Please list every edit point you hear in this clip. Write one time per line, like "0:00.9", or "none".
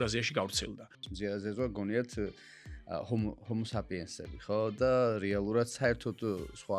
0:01.0